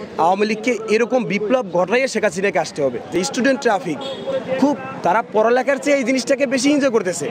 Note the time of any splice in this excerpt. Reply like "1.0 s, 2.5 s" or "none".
3.1 s